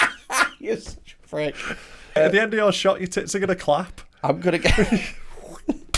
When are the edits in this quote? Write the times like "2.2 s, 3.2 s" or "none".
2.2 s

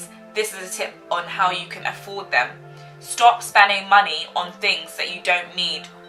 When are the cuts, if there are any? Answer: none

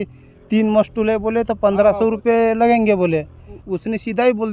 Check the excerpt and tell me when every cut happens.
3.6 s

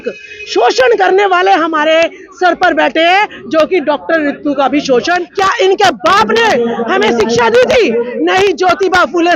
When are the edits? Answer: 5.3 s

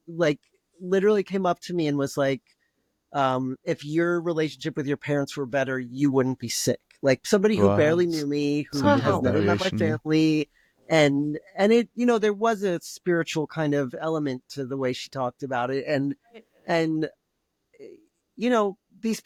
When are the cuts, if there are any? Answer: none

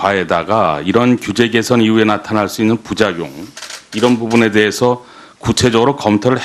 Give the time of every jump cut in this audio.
2.2 s

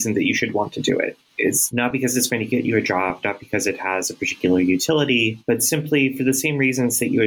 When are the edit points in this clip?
2.0 s, 5.8 s

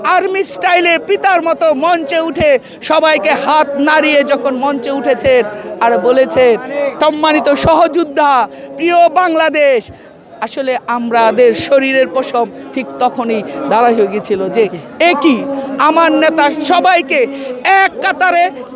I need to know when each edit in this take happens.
6.9 s

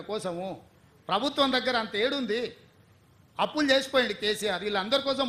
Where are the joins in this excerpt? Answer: none

